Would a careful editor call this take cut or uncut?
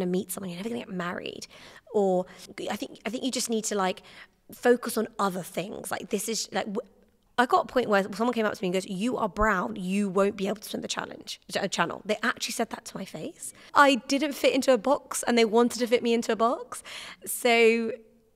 cut